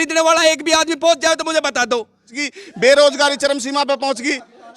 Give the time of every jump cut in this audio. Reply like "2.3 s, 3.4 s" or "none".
2.4 s